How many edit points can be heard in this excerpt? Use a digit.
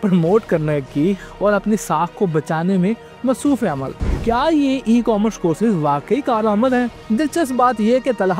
2